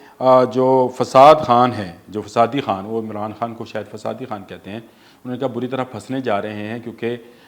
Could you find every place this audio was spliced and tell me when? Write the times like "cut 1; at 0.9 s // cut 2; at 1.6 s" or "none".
none